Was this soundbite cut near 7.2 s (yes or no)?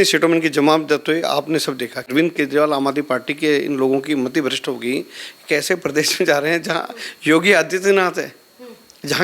no